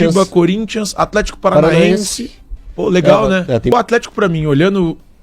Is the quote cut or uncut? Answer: cut